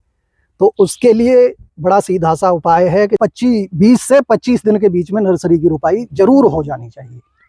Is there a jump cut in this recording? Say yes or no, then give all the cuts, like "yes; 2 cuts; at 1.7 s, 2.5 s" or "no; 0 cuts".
yes; 1 cut; at 3.2 s